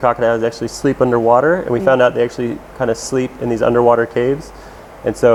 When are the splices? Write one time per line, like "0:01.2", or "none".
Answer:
none